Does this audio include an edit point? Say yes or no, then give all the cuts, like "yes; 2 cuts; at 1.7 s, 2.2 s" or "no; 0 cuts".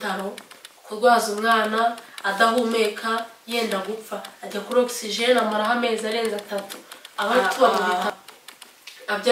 yes; 1 cut; at 7.8 s